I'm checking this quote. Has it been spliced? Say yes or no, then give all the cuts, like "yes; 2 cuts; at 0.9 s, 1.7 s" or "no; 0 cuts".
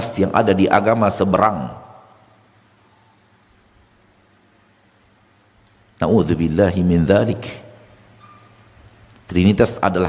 no; 0 cuts